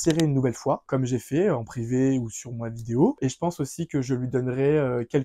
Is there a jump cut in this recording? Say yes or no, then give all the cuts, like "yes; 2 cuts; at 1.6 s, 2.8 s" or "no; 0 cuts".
no; 0 cuts